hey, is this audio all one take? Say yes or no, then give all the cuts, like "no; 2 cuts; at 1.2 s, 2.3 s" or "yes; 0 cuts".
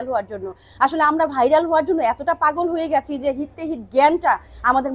yes; 0 cuts